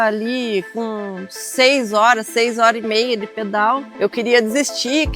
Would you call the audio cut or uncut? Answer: cut